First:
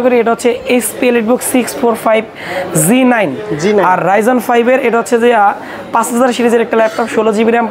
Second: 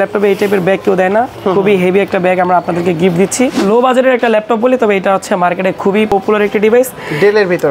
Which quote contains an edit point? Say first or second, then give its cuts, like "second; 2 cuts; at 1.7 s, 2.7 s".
second; 1 cut; at 3.6 s